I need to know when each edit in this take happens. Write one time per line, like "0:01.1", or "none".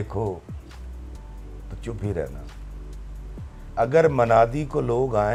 none